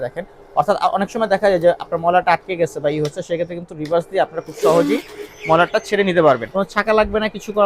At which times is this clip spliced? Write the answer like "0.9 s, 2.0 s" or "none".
6.5 s